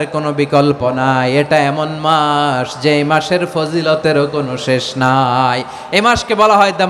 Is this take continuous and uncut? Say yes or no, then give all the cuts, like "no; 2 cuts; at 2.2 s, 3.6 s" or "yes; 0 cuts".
yes; 0 cuts